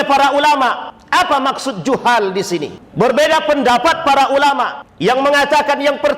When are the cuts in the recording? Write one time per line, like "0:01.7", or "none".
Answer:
0:00.9
0:02.8
0:04.8